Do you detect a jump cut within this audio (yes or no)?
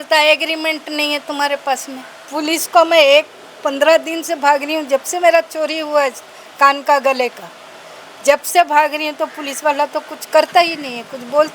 yes